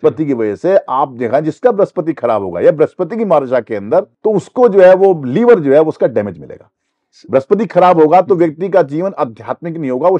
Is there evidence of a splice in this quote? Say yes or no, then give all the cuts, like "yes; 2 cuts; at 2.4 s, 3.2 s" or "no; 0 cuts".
yes; 1 cut; at 4.1 s